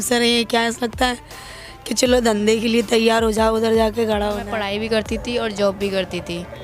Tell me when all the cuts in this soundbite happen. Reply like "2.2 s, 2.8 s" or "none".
4.5 s